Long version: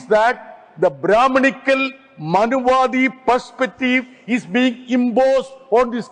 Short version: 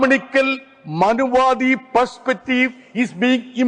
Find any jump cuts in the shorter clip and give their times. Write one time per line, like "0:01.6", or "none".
none